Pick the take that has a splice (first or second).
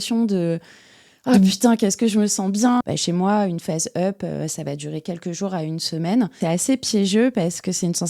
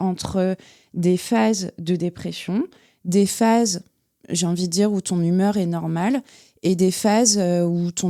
first